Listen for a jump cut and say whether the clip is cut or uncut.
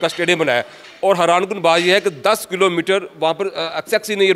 uncut